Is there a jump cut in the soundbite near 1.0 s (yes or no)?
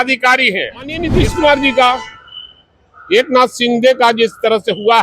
yes